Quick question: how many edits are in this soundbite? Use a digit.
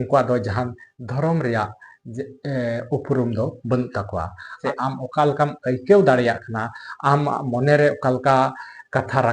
1